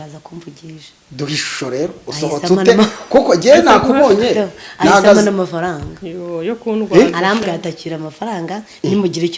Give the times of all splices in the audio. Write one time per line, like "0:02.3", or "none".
none